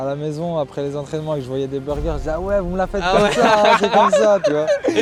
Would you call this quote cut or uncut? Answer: uncut